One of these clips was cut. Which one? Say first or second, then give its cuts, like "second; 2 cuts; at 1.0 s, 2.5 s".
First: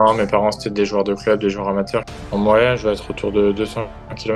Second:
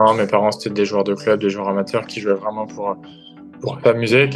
first; 1 cut; at 2.1 s